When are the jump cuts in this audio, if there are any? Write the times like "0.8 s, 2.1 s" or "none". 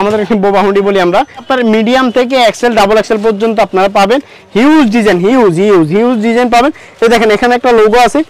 1.4 s